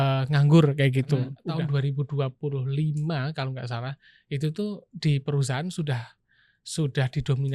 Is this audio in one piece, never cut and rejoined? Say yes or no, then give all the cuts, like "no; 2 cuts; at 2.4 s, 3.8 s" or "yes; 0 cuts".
no; 1 cut; at 1.4 s